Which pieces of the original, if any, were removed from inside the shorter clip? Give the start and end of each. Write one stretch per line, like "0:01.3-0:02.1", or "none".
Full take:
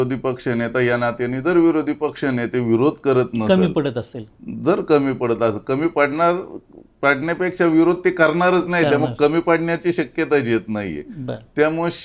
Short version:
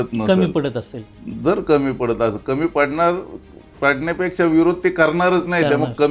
none